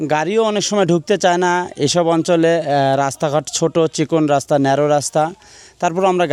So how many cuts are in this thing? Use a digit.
0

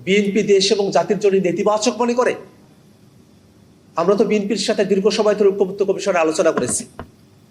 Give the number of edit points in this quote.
0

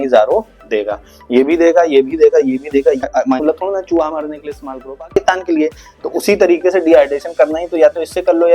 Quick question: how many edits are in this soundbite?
1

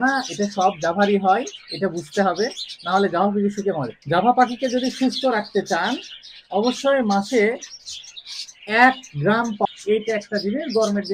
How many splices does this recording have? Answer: 2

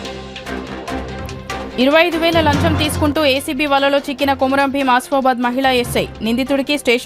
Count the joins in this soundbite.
1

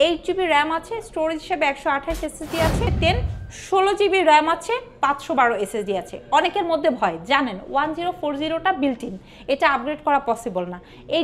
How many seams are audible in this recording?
1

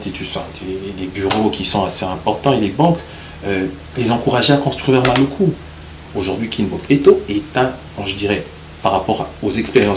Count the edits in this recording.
1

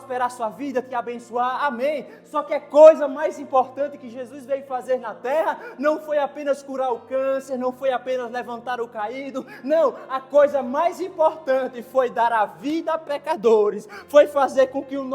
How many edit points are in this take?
0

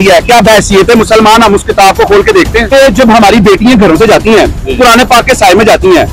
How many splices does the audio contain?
1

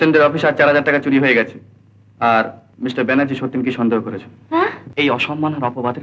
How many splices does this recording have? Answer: 2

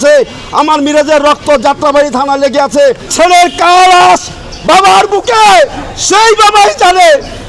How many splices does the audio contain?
1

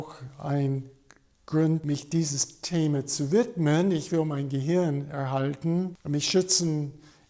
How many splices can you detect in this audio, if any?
2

